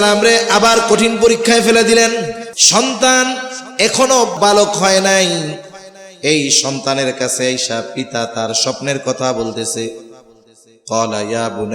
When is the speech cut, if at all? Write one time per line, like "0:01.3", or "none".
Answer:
0:02.5
0:04.3